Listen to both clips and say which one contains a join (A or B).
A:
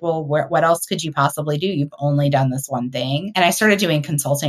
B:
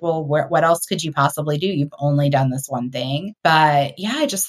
B